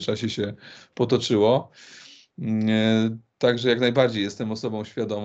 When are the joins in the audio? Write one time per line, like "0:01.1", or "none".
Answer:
none